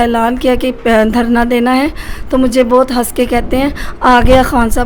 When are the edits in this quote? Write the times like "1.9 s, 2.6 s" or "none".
none